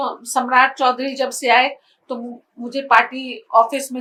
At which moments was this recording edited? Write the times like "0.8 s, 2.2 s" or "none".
none